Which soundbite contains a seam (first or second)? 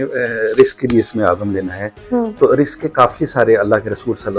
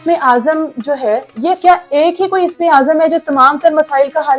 second